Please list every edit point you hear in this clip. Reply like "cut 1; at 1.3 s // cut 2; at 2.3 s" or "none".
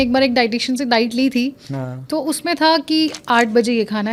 none